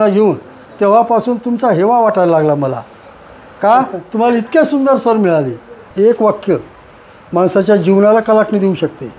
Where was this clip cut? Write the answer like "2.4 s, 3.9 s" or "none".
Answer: 5.9 s